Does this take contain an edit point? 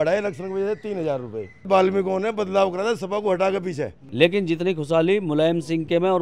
yes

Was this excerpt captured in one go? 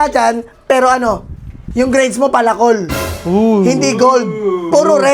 yes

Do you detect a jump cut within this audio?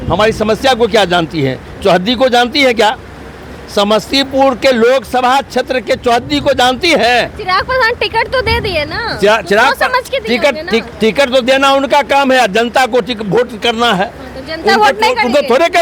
no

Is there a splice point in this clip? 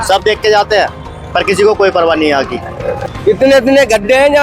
yes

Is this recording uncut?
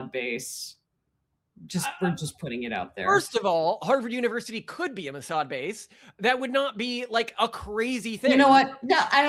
yes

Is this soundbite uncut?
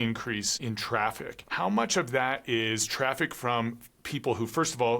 no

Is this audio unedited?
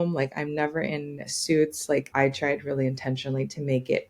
no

